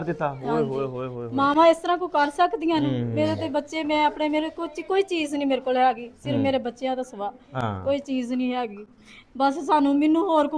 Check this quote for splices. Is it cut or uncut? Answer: uncut